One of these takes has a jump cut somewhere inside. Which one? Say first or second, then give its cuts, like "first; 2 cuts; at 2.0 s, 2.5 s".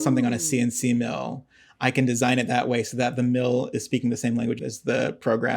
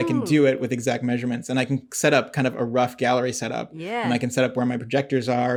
first; 1 cut; at 4.6 s